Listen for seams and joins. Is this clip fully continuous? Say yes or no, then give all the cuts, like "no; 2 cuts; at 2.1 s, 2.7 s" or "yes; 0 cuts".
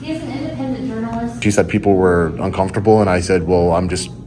no; 1 cut; at 1.4 s